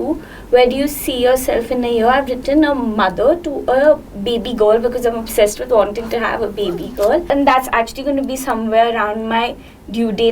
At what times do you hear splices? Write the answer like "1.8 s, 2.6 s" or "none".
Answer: 7.2 s